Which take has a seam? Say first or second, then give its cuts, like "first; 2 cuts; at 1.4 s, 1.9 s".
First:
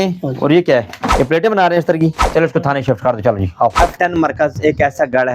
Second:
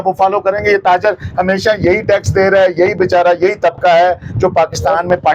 first; 3 cuts; at 1.0 s, 2.2 s, 3.8 s